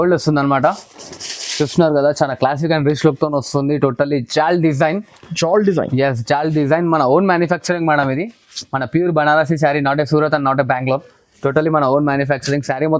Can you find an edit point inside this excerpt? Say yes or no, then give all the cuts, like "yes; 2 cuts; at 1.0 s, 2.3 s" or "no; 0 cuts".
no; 0 cuts